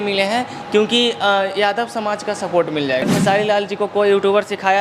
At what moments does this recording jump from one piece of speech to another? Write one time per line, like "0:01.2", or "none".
0:03.1

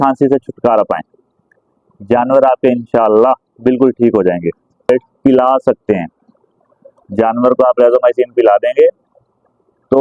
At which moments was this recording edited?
0:04.9

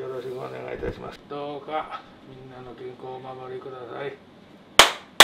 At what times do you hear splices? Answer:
0:01.2

